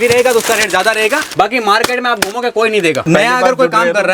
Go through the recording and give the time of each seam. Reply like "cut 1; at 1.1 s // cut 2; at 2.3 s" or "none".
cut 1; at 1.2 s // cut 2; at 3.0 s